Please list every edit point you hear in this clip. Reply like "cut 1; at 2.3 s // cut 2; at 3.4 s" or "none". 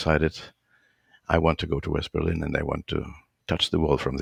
none